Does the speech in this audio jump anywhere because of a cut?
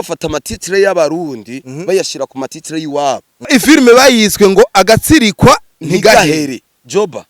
yes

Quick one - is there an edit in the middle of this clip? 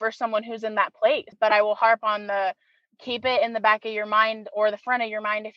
yes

